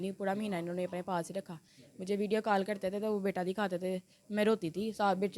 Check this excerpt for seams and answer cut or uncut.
uncut